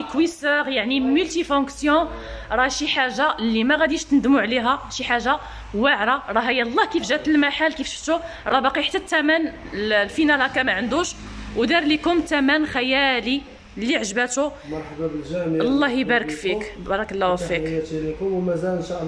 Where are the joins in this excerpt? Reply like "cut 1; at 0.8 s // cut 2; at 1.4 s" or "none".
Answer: none